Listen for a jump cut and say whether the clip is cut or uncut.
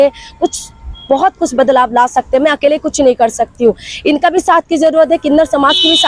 uncut